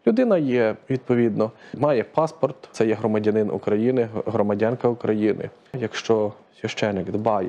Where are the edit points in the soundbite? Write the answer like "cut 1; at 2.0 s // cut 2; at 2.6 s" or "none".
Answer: cut 1; at 1.7 s // cut 2; at 2.6 s // cut 3; at 5.9 s